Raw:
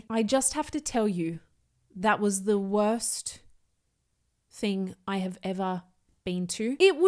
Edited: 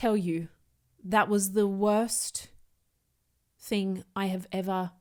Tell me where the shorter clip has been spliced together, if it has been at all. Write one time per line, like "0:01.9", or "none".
none